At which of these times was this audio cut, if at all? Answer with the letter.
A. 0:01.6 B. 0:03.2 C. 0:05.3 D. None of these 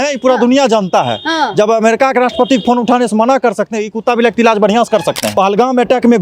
C